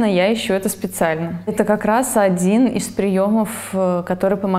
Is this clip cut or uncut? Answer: cut